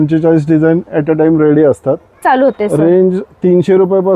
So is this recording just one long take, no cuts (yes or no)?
no